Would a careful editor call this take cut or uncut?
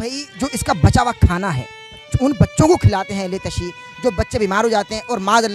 cut